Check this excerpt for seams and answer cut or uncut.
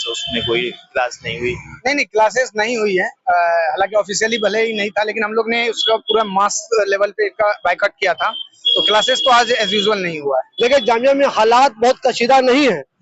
cut